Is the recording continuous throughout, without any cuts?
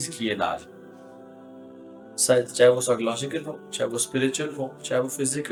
yes; 0 cuts

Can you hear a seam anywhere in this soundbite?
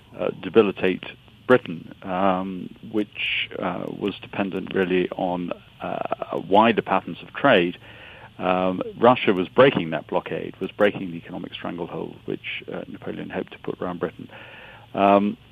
yes; 1 cut; at 4.0 s

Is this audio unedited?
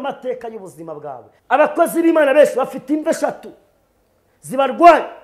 no; 1 cut; at 1.3 s

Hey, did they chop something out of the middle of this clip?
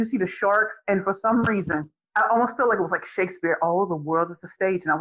yes; 1 cut; at 2.0 s

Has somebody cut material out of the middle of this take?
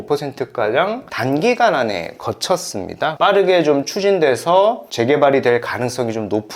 yes; 1 cut; at 3.1 s

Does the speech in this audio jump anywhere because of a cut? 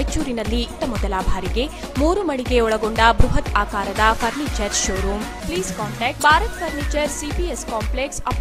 no; 0 cuts

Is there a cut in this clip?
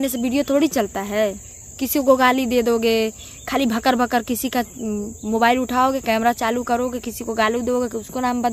no; 0 cuts

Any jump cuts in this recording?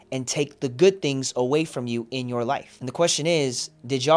yes; 1 cut; at 2.8 s

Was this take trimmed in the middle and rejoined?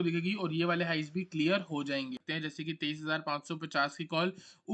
yes; 1 cut; at 2.2 s

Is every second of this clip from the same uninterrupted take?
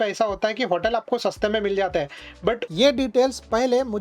no; 1 cut; at 2.6 s

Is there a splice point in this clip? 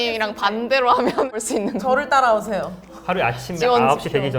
yes; 1 cut; at 1.3 s

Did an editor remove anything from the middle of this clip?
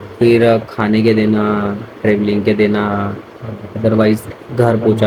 no; 0 cuts

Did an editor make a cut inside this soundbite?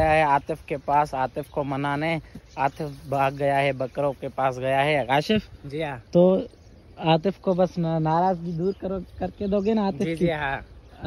no; 0 cuts

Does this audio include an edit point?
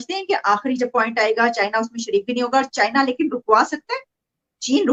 no; 0 cuts

